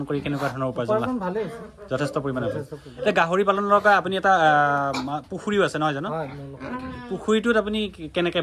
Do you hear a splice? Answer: no; 0 cuts

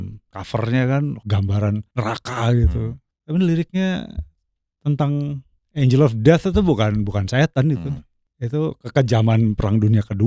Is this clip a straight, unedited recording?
yes; 0 cuts

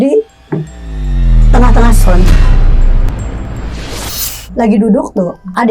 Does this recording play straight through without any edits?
no; 1 cut; at 4.4 s

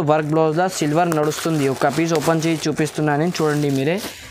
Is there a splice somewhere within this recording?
no; 0 cuts

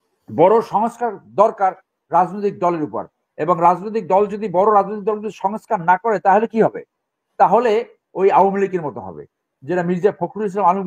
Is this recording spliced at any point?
no; 0 cuts

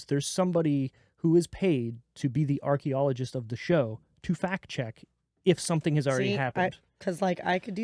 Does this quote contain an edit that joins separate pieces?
no; 0 cuts

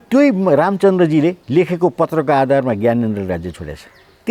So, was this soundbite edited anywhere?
yes; 1 cut; at 1.4 s

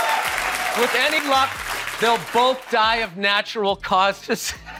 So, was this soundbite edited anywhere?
no; 0 cuts

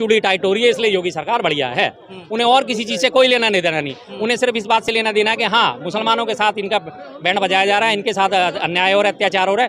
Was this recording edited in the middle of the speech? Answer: no; 0 cuts

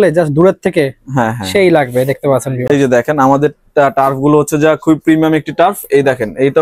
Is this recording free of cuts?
yes; 0 cuts

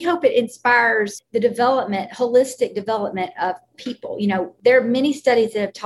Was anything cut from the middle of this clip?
yes; 2 cuts; at 1.2 s, 4.5 s

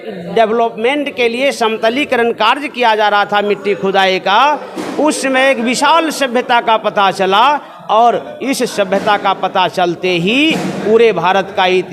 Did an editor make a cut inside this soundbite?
no; 0 cuts

